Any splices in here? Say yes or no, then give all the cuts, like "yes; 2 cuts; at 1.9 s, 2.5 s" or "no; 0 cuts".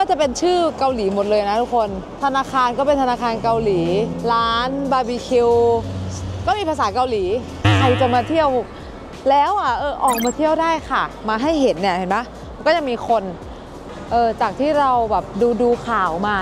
yes; 4 cuts; at 2.0 s, 4.1 s, 7.6 s, 13.9 s